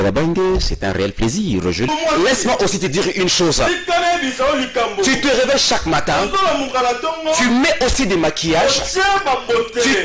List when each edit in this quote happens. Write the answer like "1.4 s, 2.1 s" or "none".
1.9 s